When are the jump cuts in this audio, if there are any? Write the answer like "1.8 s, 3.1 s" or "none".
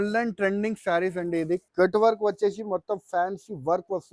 1.7 s